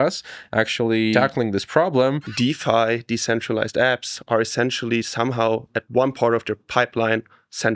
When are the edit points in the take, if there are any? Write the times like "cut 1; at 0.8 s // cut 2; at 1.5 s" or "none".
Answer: cut 1; at 1.1 s // cut 2; at 2.3 s